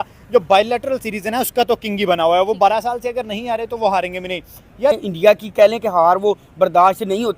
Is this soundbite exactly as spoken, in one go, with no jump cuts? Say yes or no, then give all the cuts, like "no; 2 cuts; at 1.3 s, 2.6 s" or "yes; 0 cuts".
no; 1 cut; at 4.9 s